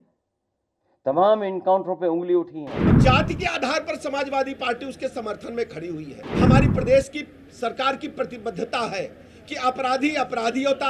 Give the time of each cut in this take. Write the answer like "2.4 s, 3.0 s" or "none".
3.0 s, 6.2 s